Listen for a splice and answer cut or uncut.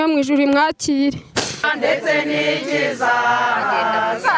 cut